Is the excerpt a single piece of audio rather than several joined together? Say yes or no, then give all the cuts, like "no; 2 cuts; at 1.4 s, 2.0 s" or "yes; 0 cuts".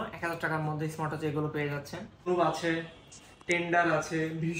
no; 1 cut; at 2.2 s